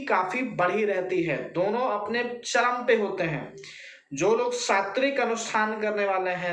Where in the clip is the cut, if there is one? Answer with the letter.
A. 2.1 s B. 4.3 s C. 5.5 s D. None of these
D